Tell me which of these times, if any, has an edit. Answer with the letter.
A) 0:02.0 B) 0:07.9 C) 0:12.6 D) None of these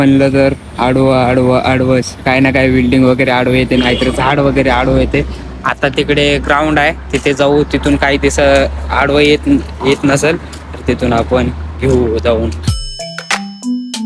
C